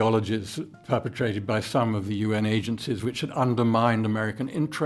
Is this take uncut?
yes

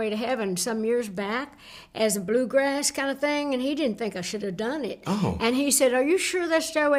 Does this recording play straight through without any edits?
yes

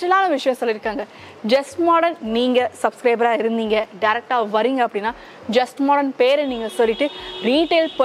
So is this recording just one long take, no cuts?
yes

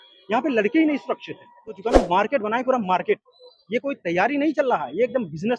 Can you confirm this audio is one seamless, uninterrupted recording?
no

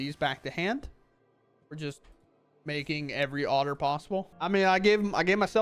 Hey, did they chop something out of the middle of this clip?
yes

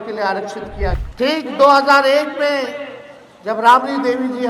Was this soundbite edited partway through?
yes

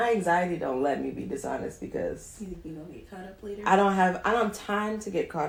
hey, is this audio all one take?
yes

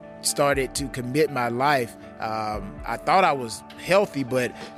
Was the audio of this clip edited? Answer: no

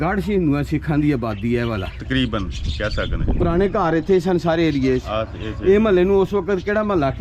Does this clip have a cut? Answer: no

